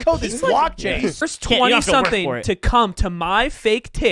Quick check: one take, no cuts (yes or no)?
no